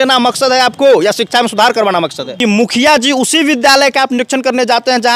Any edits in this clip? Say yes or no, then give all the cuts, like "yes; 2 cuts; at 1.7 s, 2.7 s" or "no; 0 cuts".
yes; 1 cut; at 2.2 s